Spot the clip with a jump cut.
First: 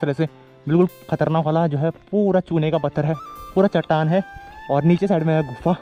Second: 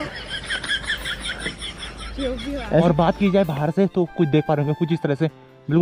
second; 1 cut; at 2.7 s

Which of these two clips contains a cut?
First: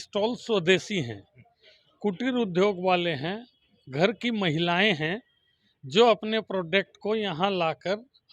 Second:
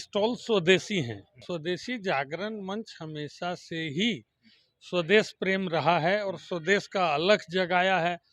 second; 1 cut; at 1.3 s

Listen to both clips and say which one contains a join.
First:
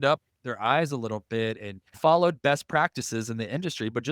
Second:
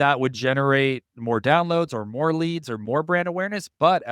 first; 1 cut; at 1.8 s

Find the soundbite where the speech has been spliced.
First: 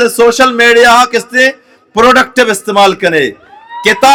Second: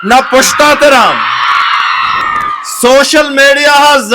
second; 1 cut; at 2.2 s

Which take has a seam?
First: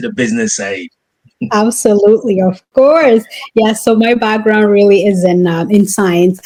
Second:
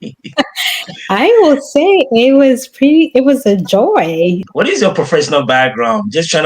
second; 1 cut; at 4.4 s

